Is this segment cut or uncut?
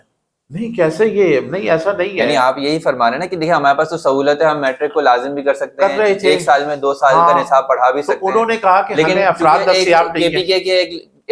uncut